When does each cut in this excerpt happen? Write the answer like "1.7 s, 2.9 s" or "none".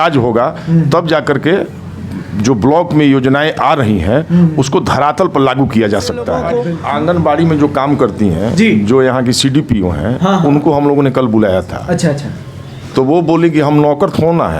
6.4 s